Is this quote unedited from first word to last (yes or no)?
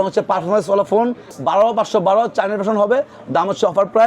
no